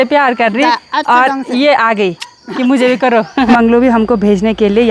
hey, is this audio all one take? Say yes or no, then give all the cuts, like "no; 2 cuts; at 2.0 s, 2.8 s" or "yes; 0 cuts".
no; 1 cut; at 3.5 s